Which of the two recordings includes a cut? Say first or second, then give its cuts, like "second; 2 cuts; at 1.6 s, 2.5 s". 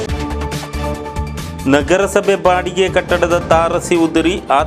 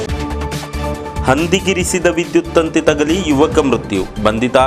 second; 1 cut; at 1.0 s